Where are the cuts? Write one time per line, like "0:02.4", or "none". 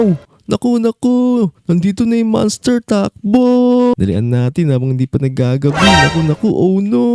0:03.9